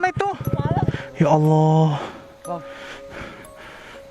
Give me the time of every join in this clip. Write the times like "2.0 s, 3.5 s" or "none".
0.9 s